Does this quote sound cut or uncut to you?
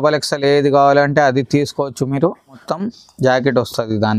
cut